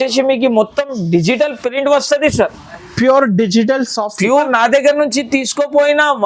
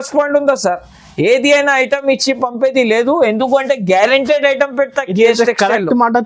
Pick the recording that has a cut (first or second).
first